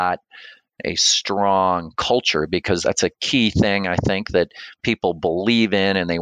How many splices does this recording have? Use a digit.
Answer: 1